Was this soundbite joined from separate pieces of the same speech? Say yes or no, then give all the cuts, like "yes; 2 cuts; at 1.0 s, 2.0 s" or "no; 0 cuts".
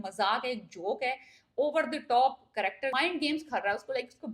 yes; 1 cut; at 2.9 s